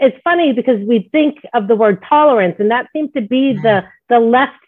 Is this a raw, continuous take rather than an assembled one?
yes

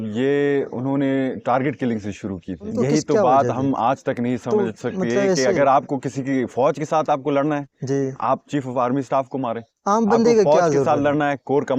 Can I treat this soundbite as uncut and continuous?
no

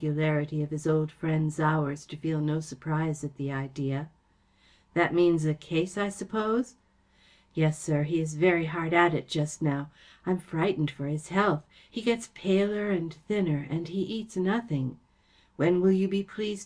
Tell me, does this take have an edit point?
yes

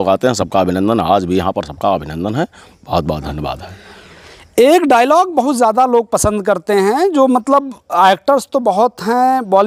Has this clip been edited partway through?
no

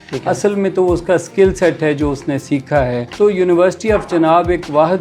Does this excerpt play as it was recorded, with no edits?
no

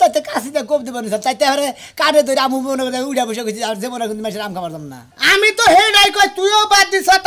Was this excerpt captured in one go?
yes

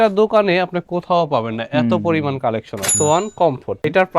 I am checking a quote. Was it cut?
yes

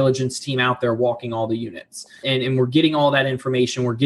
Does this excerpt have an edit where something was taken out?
yes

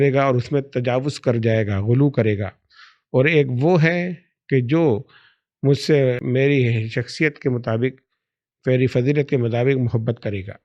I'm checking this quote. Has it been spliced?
yes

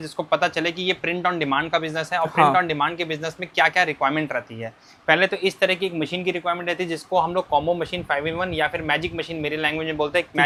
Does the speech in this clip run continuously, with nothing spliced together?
yes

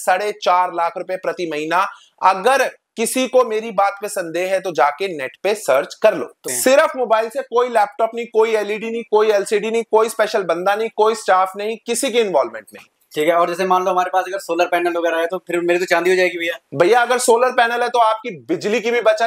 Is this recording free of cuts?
no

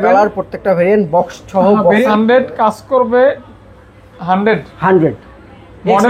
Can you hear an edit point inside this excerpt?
yes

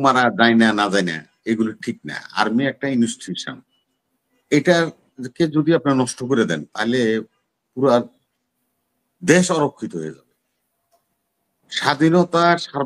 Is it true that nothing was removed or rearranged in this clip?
yes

